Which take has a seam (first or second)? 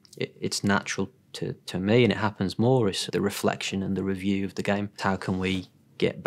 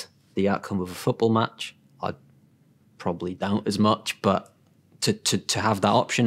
first